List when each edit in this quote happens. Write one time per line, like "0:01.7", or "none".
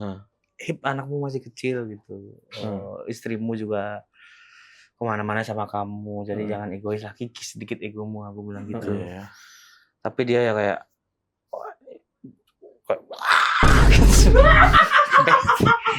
none